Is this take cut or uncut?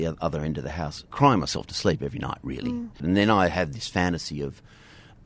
cut